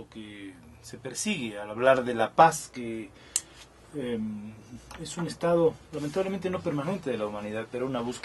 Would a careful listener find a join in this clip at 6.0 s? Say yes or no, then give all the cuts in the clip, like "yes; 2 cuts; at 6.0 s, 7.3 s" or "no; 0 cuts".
no; 0 cuts